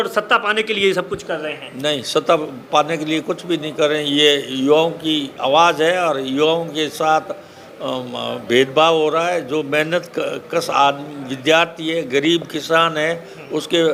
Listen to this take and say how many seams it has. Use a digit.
0